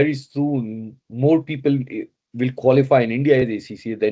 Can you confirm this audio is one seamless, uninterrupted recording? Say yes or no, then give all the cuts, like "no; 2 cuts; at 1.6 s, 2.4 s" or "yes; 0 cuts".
yes; 0 cuts